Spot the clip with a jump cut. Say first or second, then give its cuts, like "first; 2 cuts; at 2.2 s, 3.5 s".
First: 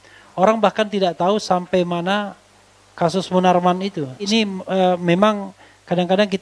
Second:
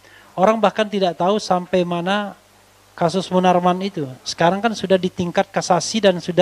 first; 1 cut; at 4.3 s